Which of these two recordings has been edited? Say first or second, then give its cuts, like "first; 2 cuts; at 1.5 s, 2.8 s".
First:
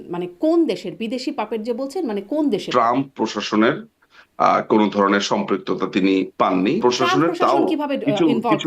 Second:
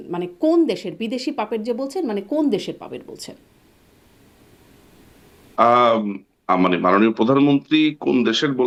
first; 2 cuts; at 2.7 s, 6.8 s